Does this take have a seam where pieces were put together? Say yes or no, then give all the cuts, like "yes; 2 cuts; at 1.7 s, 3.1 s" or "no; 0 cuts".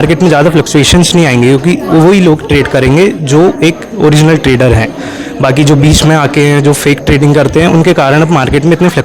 no; 0 cuts